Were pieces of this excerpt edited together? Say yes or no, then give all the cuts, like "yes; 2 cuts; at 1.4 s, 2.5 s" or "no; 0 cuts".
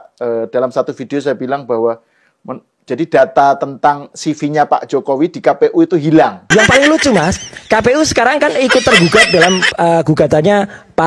no; 0 cuts